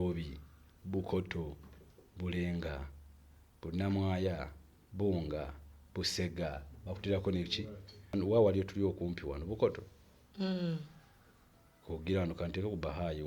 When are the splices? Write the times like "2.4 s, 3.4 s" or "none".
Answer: 8.1 s